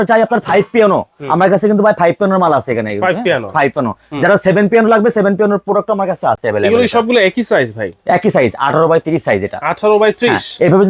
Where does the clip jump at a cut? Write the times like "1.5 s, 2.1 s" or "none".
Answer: none